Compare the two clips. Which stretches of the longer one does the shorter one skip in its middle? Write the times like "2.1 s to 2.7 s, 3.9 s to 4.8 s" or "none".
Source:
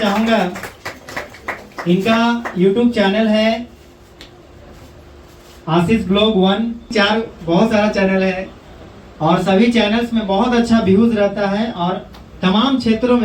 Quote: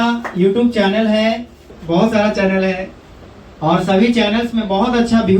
4.0 s to 7.3 s